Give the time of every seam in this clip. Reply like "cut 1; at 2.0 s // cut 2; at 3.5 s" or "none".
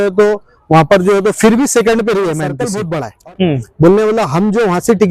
cut 1; at 2.8 s